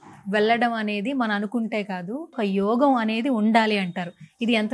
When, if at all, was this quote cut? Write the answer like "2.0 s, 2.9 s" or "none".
2.4 s